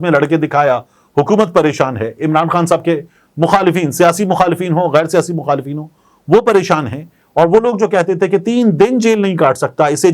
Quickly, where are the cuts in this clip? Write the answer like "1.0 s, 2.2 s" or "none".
none